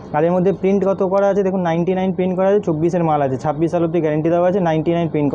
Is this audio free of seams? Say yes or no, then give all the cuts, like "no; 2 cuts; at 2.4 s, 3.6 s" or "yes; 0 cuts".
yes; 0 cuts